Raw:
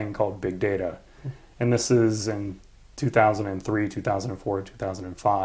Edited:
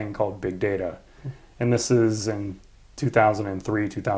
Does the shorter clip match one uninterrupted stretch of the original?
yes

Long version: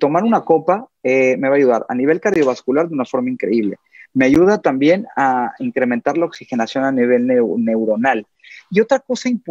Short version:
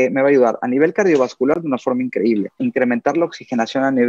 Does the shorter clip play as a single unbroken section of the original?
no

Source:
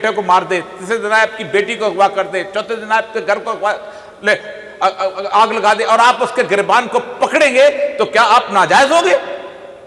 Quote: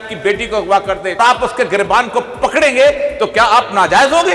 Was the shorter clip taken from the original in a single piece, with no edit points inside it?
no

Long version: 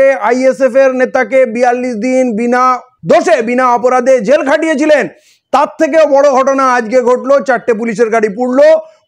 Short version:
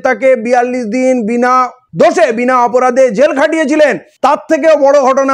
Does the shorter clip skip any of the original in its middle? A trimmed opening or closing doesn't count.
yes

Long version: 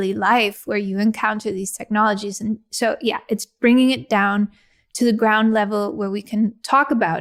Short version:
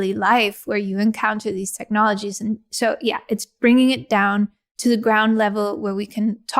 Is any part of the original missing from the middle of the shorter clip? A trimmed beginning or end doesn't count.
yes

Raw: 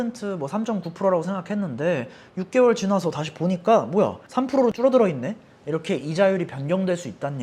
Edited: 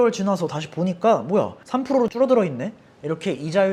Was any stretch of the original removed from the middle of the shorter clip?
no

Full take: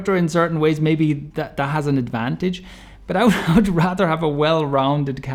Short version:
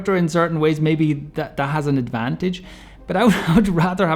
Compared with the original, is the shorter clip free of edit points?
yes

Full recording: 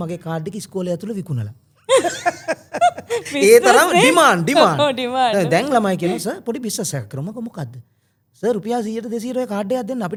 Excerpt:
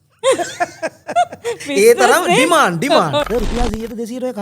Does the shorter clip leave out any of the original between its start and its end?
yes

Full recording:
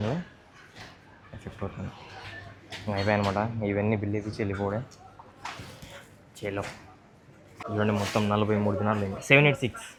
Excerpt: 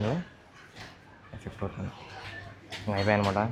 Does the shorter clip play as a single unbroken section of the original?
yes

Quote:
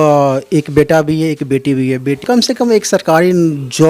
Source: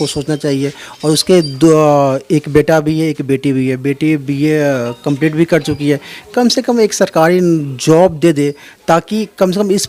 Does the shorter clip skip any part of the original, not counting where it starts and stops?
yes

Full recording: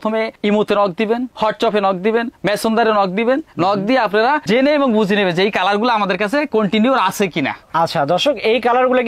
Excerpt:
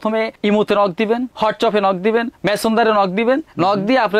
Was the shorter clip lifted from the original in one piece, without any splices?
yes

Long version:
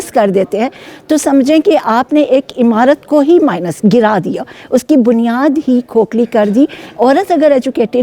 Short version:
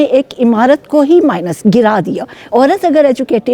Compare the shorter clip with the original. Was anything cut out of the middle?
yes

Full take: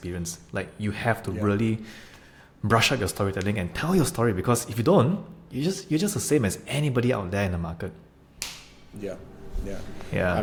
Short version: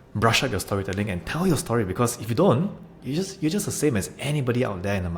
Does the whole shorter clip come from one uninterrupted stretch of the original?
yes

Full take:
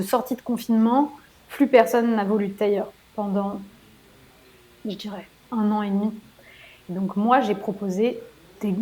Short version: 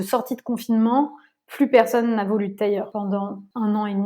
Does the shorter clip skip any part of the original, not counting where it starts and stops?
yes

